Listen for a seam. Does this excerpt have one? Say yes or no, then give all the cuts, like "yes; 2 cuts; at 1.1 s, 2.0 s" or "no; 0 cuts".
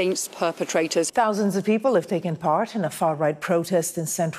yes; 1 cut; at 1.1 s